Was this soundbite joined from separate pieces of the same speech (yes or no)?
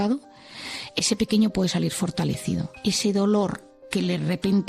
yes